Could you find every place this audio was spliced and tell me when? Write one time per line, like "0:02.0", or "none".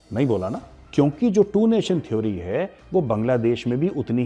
0:01.0